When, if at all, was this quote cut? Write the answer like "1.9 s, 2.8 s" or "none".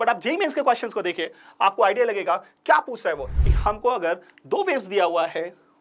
3.3 s